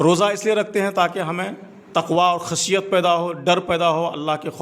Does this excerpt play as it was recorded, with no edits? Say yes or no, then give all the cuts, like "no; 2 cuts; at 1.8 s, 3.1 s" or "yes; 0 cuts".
yes; 0 cuts